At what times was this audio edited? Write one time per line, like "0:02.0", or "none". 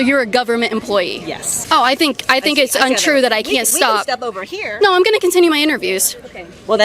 0:01.4